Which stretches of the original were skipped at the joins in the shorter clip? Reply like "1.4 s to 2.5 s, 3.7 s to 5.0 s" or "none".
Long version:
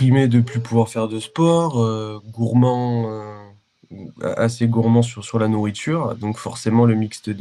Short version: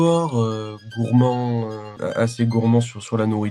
3.3 s to 4.1 s